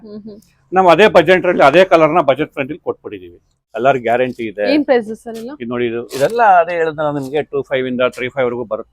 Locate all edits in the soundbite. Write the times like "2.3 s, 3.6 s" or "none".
3.7 s